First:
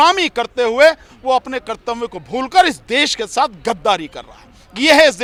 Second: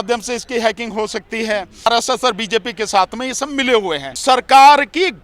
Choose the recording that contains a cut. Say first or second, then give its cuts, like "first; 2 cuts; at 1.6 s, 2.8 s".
second; 2 cuts; at 1.9 s, 4.2 s